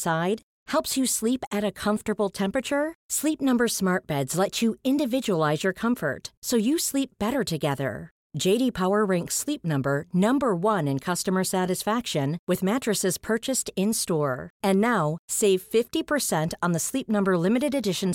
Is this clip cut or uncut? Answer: uncut